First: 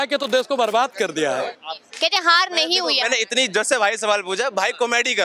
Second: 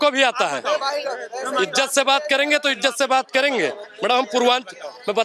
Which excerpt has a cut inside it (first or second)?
first